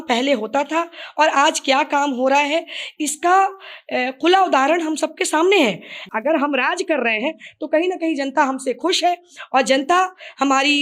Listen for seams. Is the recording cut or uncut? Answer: cut